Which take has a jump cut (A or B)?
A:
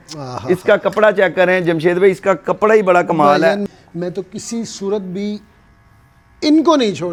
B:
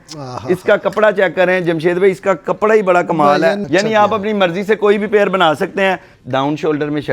B